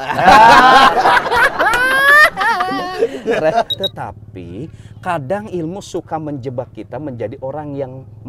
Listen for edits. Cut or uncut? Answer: cut